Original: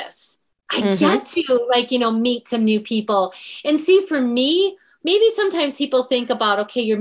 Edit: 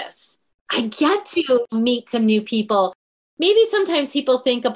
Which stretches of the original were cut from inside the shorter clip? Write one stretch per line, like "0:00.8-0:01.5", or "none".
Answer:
0:01.7-0:02.1
0:03.5-0:04.8

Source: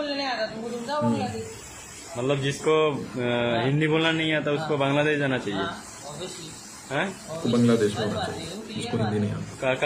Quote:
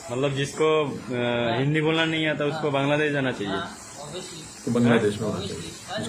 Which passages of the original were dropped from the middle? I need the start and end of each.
0:06.7-0:07.4

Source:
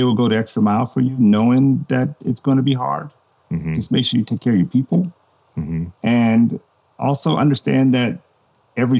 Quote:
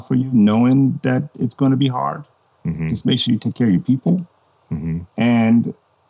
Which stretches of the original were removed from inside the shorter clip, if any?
none

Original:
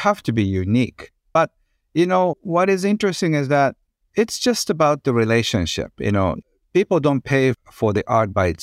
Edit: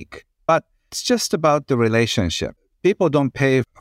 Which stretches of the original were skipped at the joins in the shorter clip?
0:01.8-0:04.3
0:05.9-0:06.5

